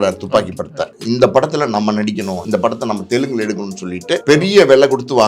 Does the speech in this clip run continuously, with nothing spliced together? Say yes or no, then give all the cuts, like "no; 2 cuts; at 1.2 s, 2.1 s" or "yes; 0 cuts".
no; 3 cuts; at 0.9 s, 2.4 s, 4.2 s